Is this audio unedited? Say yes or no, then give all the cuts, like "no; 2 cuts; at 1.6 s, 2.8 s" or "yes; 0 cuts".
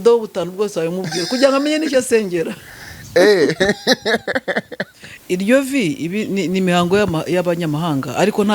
no; 1 cut; at 5.1 s